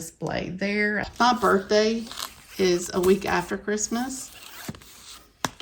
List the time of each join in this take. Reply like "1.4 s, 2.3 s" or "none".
1.0 s